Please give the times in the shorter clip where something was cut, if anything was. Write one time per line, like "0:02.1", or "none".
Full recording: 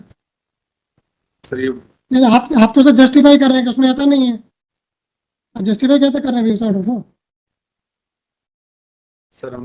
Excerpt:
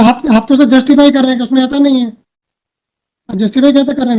none